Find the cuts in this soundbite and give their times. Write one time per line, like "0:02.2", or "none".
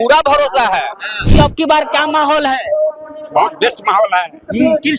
0:01.3